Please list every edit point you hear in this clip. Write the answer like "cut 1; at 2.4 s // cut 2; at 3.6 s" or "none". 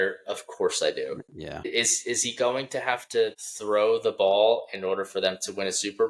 cut 1; at 1.7 s // cut 2; at 3.5 s